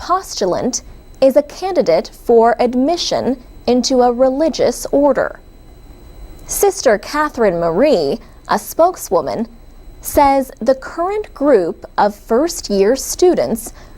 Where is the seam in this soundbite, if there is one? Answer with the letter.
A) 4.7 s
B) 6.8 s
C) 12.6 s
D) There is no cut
B